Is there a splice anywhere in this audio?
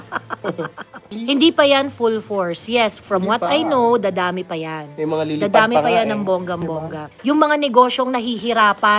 yes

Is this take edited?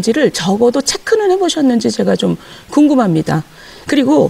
no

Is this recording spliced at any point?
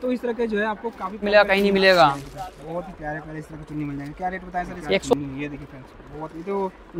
yes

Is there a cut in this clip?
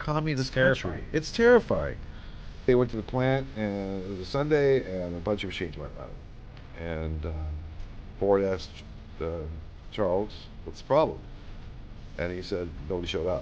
yes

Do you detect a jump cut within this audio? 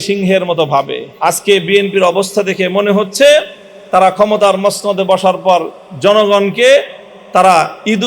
yes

